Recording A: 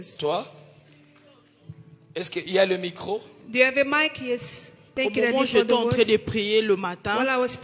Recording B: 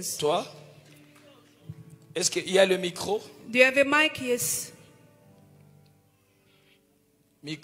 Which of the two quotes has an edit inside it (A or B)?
A